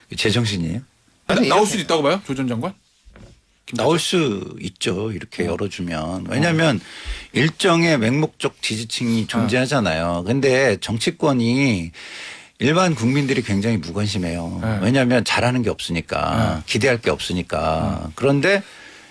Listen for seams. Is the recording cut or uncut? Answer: cut